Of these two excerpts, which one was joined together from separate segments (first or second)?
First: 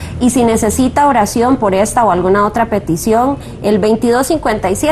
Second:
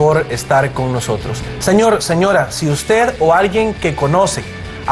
first